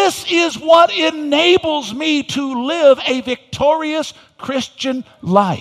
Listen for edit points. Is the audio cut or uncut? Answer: uncut